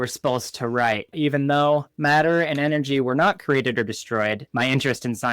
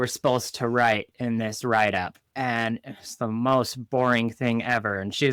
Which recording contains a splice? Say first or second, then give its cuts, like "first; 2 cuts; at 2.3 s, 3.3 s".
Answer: first; 3 cuts; at 1.1 s, 1.9 s, 4.4 s